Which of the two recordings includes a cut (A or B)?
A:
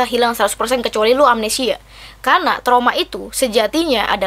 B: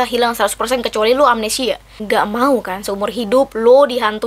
B